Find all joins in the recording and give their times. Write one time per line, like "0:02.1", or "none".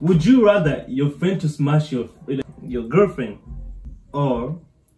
0:02.4